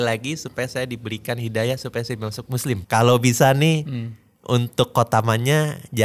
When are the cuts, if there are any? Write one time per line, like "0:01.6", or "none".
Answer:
0:02.8

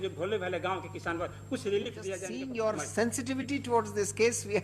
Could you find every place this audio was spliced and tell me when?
0:02.3

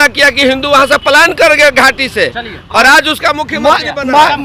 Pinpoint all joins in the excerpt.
none

